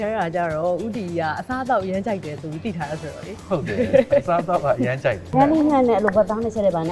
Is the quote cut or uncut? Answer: cut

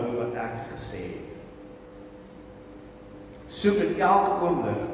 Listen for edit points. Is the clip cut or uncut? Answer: cut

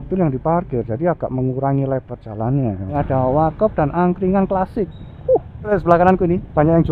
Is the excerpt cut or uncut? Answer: cut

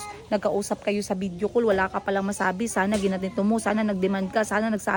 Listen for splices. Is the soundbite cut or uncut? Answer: uncut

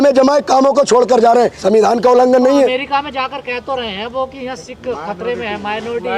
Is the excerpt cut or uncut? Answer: uncut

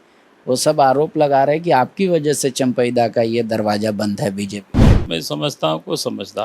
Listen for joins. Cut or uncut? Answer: cut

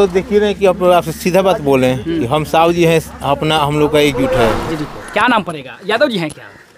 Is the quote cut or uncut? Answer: cut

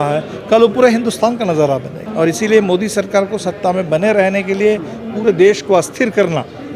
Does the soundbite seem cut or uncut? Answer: cut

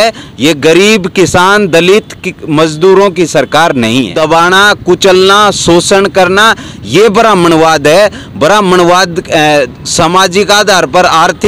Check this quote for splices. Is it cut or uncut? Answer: cut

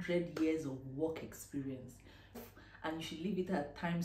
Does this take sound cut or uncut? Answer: cut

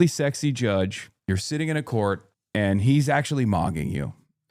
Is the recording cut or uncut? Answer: cut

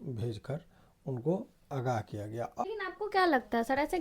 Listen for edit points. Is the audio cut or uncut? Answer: cut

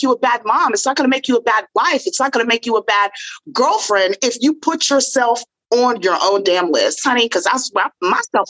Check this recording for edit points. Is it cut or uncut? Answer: uncut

